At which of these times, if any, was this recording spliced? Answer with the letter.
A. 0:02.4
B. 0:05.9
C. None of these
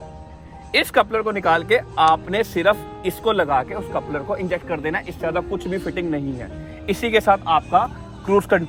C